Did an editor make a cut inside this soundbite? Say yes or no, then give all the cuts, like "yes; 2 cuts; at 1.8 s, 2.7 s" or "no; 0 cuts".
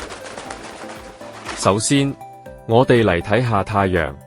yes; 1 cut; at 1.2 s